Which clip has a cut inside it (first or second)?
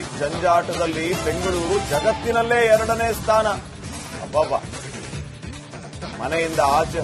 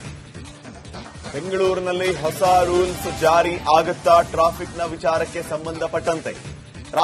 second